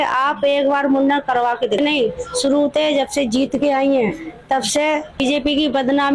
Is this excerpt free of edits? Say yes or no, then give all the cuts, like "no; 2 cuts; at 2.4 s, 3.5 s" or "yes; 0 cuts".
no; 2 cuts; at 1.8 s, 5.2 s